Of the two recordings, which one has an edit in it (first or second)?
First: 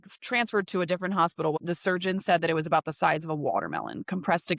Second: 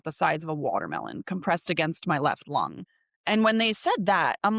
first